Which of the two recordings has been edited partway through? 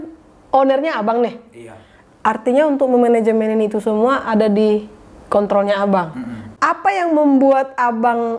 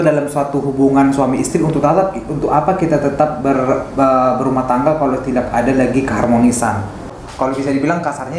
second; 1 cut; at 7.2 s

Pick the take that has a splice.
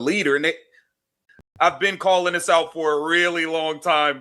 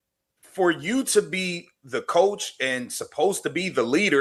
first; 1 cut; at 1.3 s

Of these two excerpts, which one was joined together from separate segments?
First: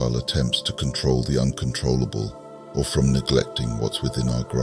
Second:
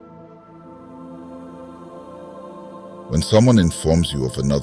second; 2 cuts; at 1.1 s, 3.1 s

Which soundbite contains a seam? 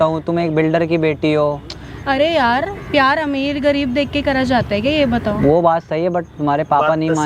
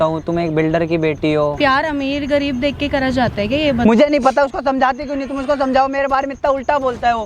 second; 2 cuts; at 1.6 s, 3.8 s

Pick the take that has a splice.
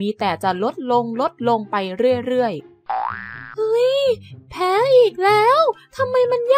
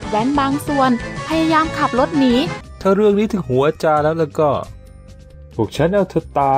second; 1 cut; at 2.6 s

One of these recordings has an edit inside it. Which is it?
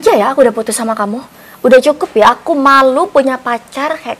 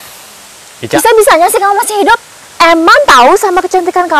second; 1 cut; at 2.4 s

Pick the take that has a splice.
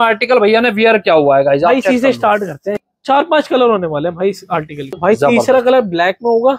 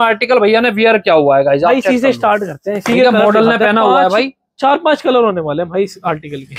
first; 2 cuts; at 2.8 s, 5.0 s

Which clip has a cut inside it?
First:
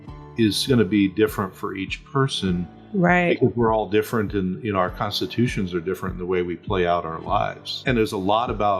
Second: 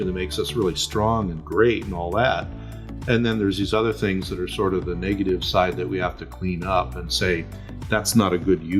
first; 1 cut; at 7.7 s

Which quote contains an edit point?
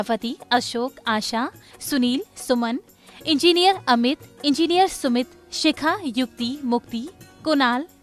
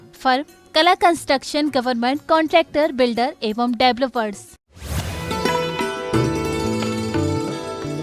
second; 1 cut; at 4.7 s

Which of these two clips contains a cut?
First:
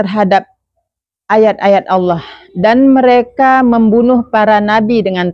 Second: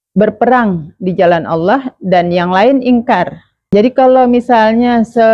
second; 1 cut; at 3.7 s

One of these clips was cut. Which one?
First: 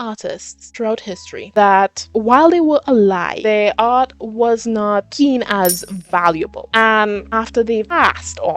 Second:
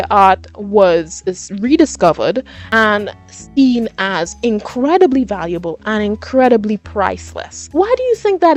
first; 1 cut; at 6.6 s

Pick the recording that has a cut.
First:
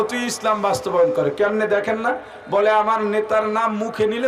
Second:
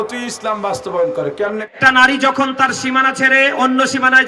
second; 1 cut; at 1.6 s

